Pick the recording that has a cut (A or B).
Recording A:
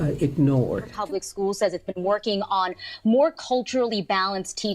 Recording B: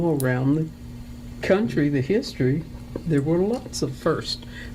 A